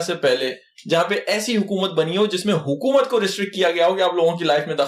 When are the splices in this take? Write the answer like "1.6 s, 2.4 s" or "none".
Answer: none